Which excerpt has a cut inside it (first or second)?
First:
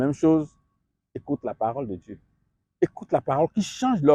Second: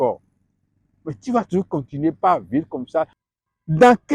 second